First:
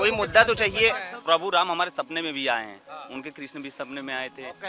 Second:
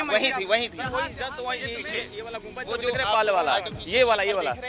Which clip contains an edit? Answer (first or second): first